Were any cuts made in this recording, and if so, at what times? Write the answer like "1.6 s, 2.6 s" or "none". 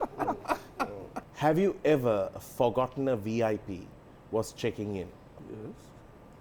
1.2 s, 5.4 s